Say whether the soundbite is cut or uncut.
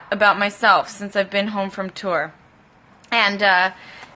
uncut